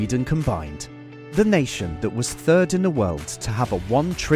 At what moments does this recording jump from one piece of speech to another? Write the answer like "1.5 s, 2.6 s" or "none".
none